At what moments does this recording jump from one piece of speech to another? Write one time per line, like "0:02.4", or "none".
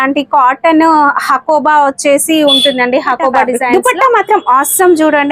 0:03.6